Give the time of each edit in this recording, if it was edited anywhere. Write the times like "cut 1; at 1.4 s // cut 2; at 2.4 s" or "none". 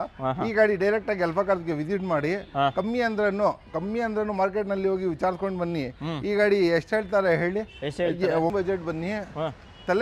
cut 1; at 8.5 s

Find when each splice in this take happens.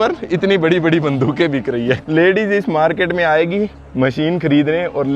cut 1; at 2.0 s

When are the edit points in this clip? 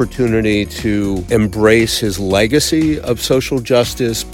cut 1; at 0.9 s

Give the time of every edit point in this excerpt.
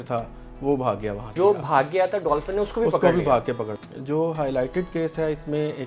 cut 1; at 1.2 s // cut 2; at 3.7 s

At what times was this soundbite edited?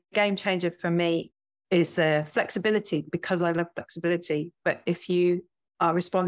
cut 1; at 1.3 s // cut 2; at 3.1 s

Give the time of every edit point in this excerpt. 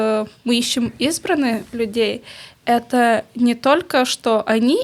none

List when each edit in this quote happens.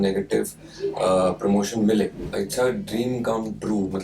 cut 1; at 2.2 s

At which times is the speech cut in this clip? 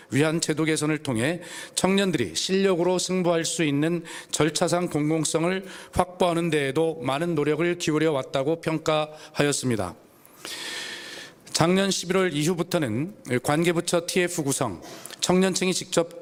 none

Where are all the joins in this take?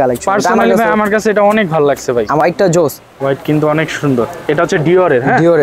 cut 1; at 2.4 s

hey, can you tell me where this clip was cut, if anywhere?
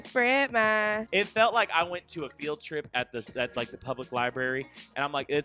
cut 1; at 1.0 s

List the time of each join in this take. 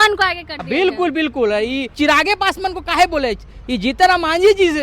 cut 1; at 1.9 s

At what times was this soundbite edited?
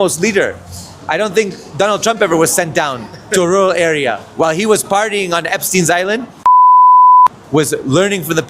cut 1; at 0.9 s

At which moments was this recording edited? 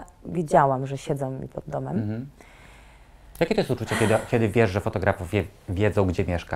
none

